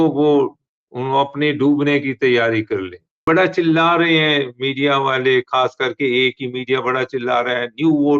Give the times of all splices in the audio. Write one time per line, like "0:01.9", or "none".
0:03.1